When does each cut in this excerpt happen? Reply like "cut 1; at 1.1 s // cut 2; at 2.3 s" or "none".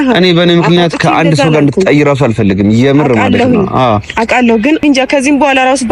cut 1; at 4.8 s